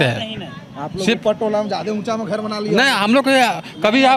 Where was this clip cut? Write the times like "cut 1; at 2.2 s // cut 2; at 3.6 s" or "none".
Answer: none

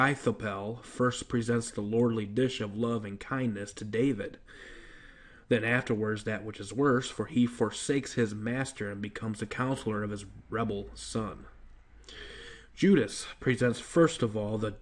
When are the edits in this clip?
cut 1; at 9.4 s

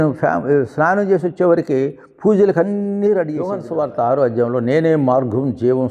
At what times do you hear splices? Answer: cut 1; at 3.6 s

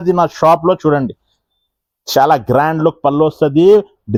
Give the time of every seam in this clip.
none

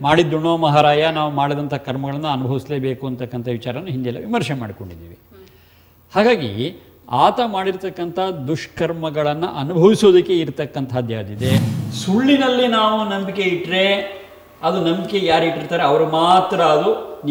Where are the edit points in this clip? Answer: cut 1; at 11.7 s

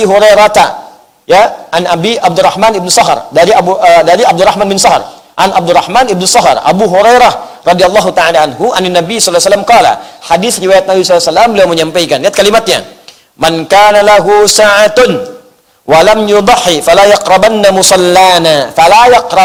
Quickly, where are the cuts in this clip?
none

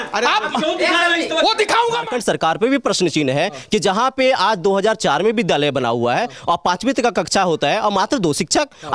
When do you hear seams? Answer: cut 1; at 2.0 s

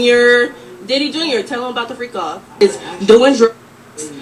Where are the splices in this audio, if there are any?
cut 1; at 2.6 s

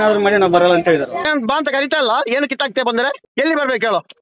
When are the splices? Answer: cut 1; at 1.3 s // cut 2; at 3.2 s

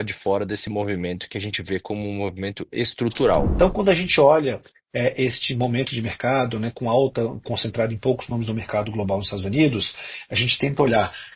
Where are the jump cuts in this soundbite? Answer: cut 1; at 3.5 s

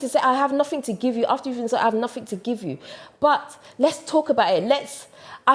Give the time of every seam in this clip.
none

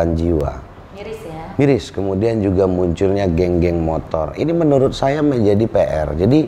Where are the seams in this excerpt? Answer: none

